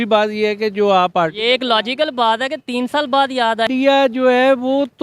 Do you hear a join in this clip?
yes; 1 cut; at 3.7 s

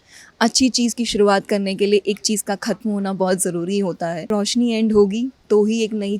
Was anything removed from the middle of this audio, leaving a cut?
yes; 1 cut; at 4.3 s

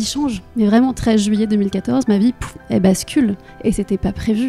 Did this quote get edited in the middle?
no; 0 cuts

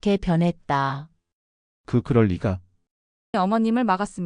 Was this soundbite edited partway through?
yes; 1 cut; at 3.3 s

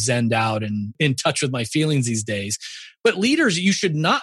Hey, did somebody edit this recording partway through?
yes; 1 cut; at 1.0 s

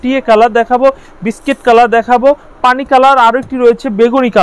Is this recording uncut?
yes; 0 cuts

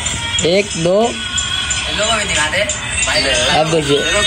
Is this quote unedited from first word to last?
yes; 0 cuts

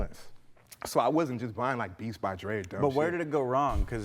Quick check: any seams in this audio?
yes; 1 cut; at 2.5 s

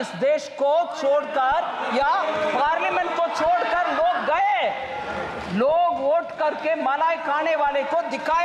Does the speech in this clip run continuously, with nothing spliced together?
yes; 0 cuts

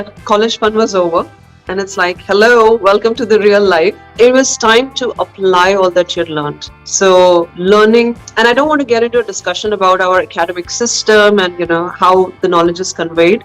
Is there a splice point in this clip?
no; 0 cuts

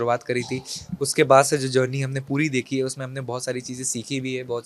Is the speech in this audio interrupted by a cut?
no; 0 cuts

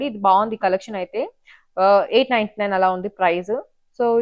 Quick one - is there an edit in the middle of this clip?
no; 0 cuts

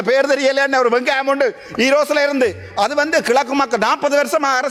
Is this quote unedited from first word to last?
yes; 0 cuts

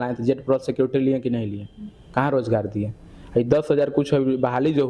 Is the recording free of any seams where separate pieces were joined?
yes; 0 cuts

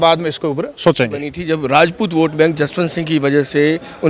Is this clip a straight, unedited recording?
no; 1 cut; at 1.4 s

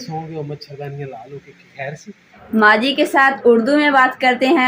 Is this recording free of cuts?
no; 1 cut; at 2.3 s

